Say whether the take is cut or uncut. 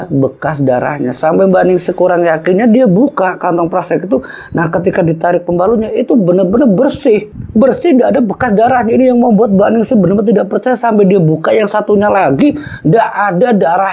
uncut